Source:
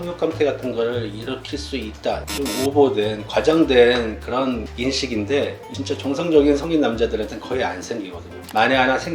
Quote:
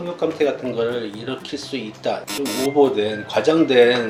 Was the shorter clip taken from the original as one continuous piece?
yes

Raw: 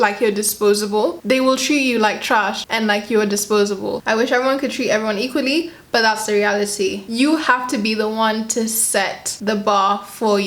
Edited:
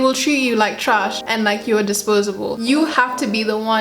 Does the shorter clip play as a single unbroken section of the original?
no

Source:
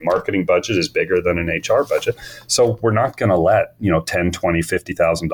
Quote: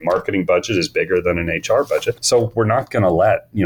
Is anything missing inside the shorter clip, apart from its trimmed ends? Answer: yes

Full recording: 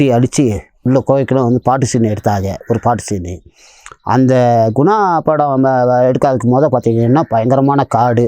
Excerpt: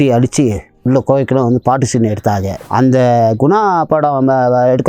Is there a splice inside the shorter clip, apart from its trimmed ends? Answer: yes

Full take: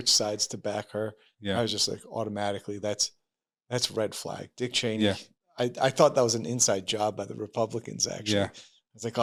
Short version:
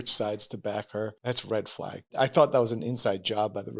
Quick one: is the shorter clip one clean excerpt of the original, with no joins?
no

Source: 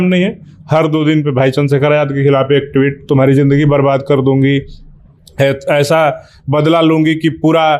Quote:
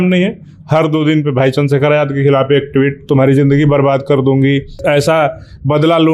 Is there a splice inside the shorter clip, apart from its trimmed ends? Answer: yes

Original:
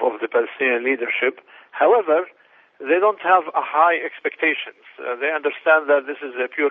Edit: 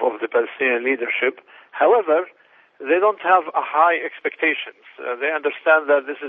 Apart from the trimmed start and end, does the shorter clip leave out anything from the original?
no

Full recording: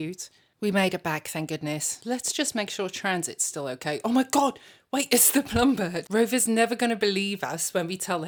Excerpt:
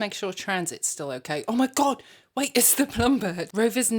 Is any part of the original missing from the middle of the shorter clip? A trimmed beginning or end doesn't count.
no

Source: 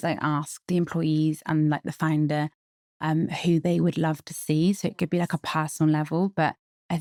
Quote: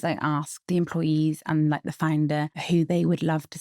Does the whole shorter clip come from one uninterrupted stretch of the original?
no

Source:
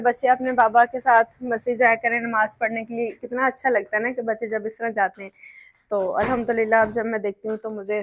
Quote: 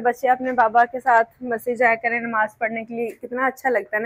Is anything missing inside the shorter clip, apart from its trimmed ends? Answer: no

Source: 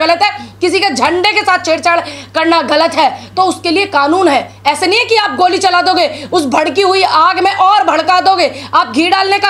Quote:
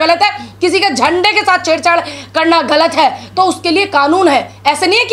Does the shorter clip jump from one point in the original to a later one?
no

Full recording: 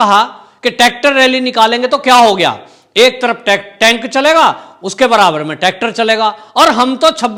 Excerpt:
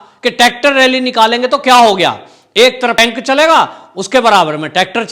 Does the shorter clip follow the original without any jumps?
no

